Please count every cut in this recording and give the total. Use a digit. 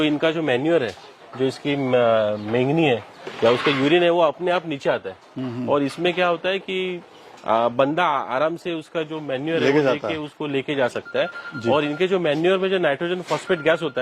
0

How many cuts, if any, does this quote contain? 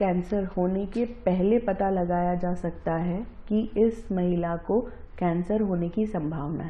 0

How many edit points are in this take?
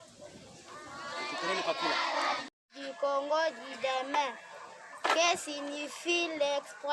1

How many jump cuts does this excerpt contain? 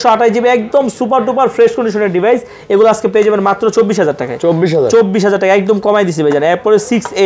0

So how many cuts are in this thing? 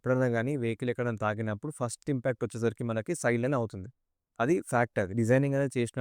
1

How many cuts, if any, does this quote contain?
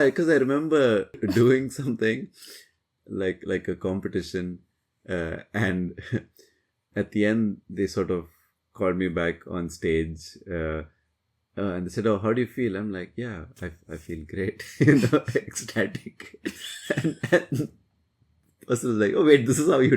1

